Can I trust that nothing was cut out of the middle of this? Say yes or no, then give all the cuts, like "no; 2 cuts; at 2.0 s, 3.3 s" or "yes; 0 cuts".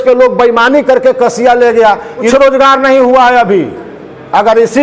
no; 1 cut; at 2.3 s